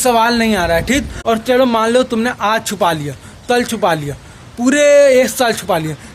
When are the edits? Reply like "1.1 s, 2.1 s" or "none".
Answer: 1.2 s